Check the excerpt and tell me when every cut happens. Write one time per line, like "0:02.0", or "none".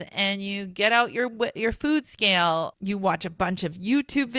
0:02.7